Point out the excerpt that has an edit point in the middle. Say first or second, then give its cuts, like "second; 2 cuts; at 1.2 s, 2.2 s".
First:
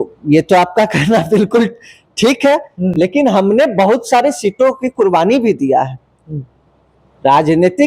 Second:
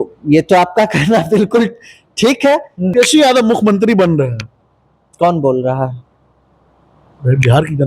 second; 1 cut; at 2.9 s